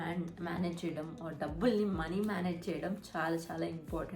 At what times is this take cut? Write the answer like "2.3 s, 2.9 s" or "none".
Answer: none